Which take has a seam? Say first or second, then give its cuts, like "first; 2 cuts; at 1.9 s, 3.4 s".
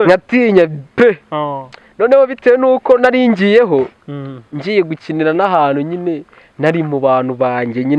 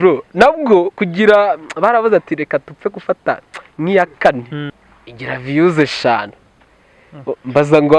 second; 1 cut; at 4.6 s